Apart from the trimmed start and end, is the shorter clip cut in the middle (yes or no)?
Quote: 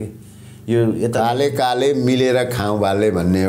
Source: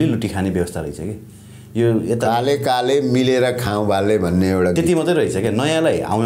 no